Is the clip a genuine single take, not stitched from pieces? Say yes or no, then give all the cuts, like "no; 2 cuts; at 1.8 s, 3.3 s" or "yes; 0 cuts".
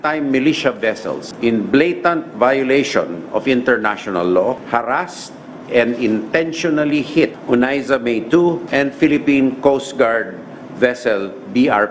no; 4 cuts; at 1.3 s, 4.6 s, 7.4 s, 8.6 s